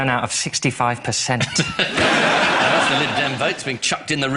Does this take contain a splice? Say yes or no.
yes